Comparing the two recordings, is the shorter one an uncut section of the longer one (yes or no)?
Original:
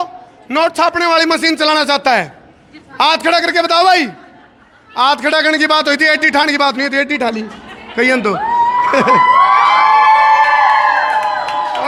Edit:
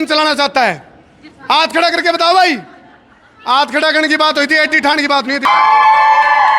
no